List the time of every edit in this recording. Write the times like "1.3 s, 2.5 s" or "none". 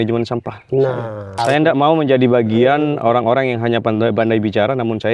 1.4 s